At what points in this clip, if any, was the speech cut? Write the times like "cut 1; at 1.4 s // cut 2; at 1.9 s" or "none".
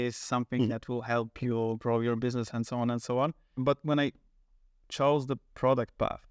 cut 1; at 3.6 s

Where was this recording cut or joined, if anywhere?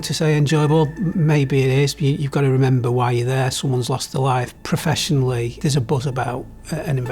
cut 1; at 1.1 s // cut 2; at 4.5 s // cut 3; at 5.6 s

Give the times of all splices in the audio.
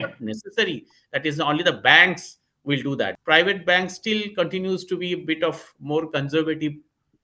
cut 1; at 3.1 s

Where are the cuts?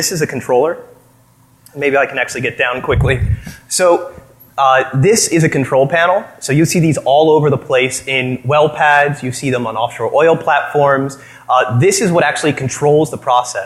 cut 1; at 9.2 s

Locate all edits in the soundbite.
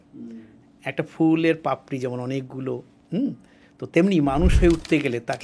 none

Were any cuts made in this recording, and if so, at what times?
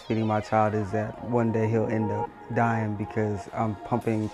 none

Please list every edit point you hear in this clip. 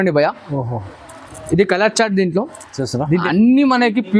cut 1; at 3.2 s

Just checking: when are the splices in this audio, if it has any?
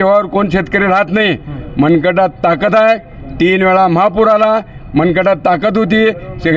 none

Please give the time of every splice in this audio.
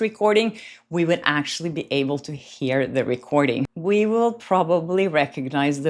cut 1; at 3.7 s

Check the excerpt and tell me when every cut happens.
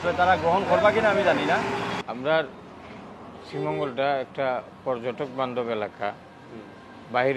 cut 1; at 1.9 s

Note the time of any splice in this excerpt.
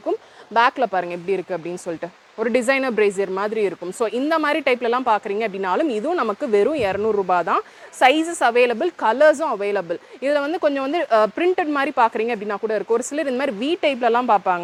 none

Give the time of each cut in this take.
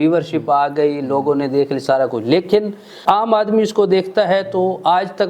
cut 1; at 3.0 s

